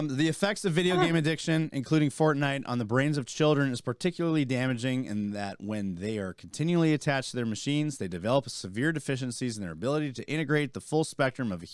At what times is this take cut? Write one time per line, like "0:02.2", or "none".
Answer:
none